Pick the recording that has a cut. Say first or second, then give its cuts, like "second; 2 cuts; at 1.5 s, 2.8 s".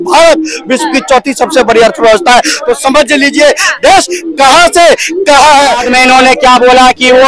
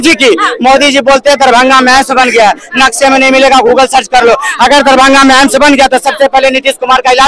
first; 1 cut; at 5.9 s